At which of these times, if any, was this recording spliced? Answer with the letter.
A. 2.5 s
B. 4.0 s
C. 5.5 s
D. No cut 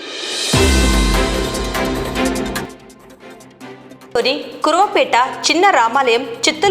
B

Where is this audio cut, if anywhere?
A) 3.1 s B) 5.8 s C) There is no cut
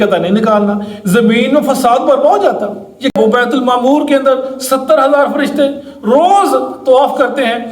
A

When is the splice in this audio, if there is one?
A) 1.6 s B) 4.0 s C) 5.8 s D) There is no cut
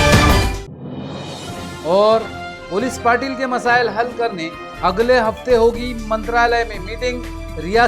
A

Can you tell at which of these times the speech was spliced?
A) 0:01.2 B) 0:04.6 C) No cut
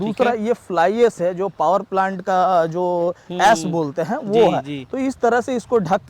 C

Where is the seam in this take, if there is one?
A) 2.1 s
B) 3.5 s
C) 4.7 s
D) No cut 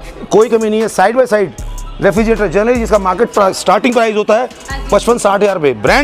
D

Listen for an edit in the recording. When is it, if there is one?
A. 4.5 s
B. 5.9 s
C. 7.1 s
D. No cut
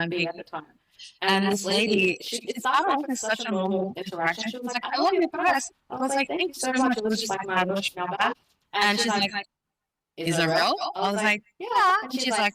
D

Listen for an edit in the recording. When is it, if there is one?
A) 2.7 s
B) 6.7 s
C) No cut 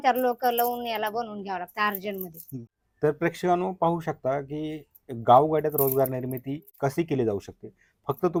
C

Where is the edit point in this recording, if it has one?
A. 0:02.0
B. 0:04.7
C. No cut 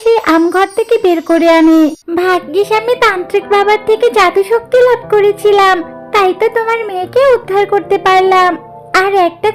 A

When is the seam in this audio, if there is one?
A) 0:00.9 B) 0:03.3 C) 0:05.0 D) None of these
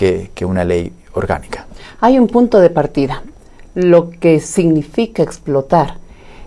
A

